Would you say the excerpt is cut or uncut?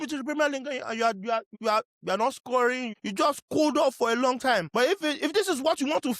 cut